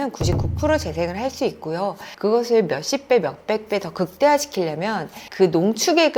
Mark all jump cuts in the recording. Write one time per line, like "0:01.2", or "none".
0:02.0

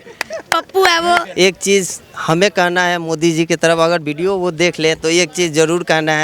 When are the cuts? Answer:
0:01.3

